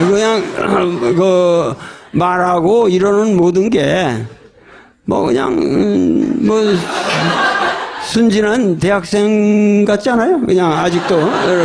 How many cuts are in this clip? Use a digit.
0